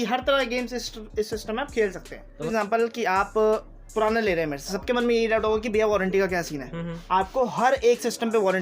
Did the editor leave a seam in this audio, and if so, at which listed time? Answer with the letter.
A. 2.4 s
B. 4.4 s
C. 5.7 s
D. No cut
A